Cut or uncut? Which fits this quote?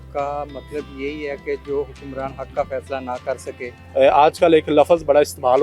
cut